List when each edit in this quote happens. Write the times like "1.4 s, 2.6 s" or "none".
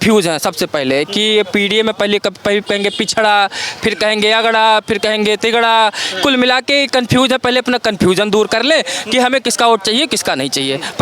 none